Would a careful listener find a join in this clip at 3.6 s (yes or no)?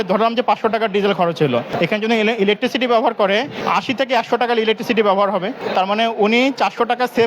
yes